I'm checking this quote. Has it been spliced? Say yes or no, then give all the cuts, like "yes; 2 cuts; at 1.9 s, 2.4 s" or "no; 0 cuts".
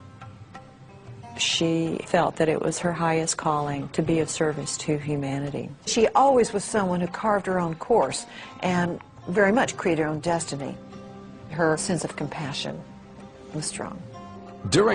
no; 0 cuts